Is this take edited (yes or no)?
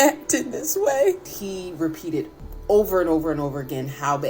yes